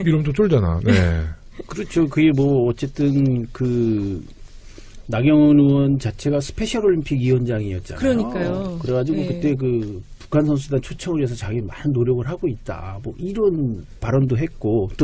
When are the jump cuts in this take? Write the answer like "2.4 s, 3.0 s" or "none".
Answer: 10.3 s